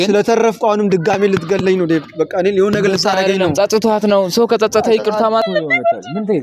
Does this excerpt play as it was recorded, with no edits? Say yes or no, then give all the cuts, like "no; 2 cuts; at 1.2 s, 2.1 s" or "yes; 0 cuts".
no; 1 cut; at 5.4 s